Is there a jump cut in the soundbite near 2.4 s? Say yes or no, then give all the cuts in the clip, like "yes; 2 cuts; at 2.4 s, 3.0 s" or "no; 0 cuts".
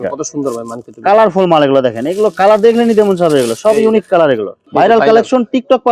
no; 1 cut; at 4.6 s